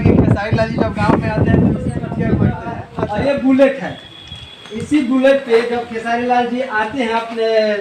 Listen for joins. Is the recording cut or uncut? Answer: cut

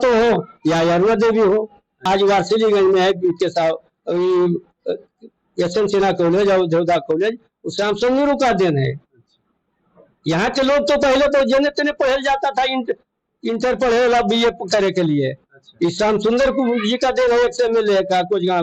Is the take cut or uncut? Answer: cut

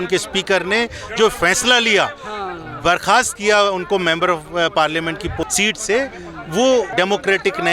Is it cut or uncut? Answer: cut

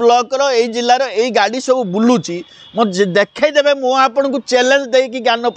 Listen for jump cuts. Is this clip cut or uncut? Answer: uncut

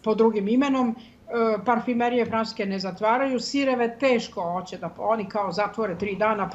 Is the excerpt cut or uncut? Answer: uncut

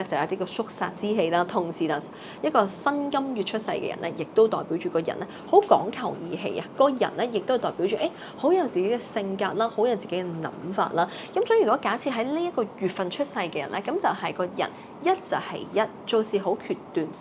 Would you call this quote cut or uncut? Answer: uncut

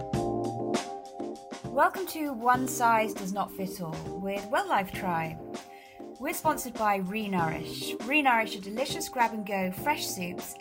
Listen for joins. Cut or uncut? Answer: cut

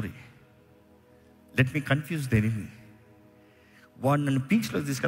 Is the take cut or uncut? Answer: uncut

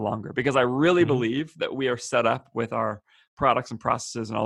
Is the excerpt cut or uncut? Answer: uncut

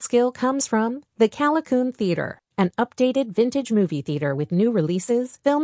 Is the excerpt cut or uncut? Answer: uncut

